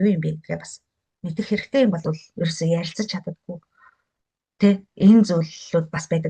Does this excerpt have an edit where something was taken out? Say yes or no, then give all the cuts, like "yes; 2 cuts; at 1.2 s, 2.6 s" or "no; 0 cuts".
yes; 1 cut; at 2.0 s